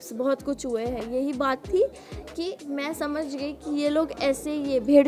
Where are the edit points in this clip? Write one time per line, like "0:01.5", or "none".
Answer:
none